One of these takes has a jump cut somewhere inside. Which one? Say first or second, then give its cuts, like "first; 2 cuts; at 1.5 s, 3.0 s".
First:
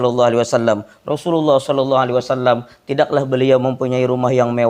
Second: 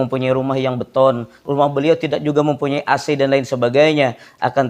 second; 1 cut; at 1.4 s